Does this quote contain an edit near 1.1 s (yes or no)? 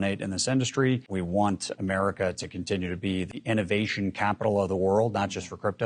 yes